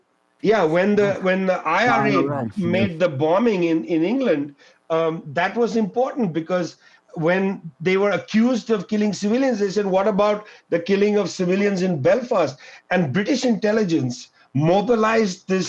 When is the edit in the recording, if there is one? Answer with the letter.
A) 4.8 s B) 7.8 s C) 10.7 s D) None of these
D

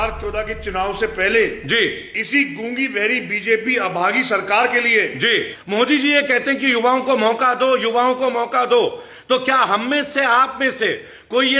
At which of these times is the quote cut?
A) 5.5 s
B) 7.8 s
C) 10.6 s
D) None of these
A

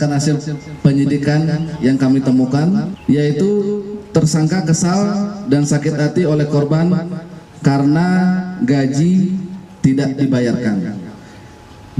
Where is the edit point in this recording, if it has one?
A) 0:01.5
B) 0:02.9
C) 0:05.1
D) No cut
B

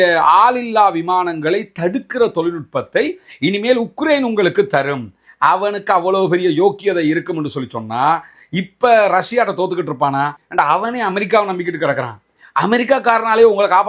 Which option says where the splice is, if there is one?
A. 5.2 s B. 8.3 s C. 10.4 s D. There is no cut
C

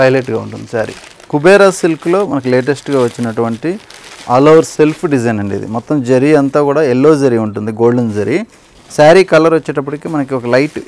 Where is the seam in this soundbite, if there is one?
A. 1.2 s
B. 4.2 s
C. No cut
A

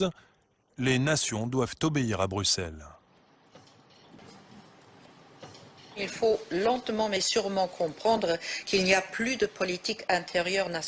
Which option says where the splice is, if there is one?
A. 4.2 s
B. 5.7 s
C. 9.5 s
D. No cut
A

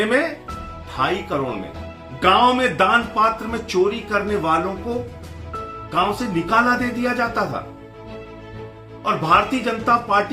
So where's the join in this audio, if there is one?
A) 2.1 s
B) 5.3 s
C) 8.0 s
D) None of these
A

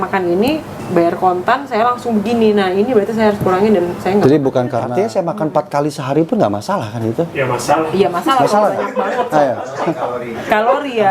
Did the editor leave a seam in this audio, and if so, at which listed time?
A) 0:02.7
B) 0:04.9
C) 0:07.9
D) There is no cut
B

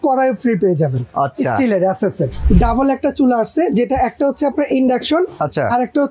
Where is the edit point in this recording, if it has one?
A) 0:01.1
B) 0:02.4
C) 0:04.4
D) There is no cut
B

